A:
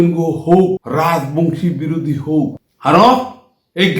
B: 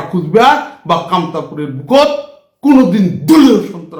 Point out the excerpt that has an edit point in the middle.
A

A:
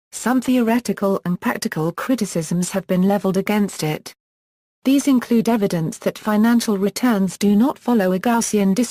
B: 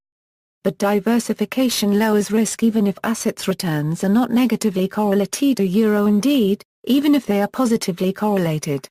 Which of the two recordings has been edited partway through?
B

